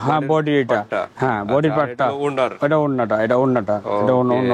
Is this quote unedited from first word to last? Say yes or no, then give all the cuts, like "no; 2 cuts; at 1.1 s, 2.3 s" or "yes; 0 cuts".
yes; 0 cuts